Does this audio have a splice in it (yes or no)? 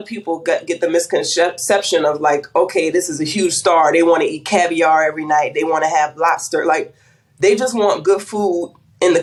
no